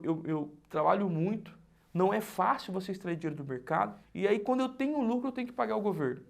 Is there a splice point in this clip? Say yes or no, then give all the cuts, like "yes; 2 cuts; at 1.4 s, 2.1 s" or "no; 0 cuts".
yes; 1 cut; at 4.0 s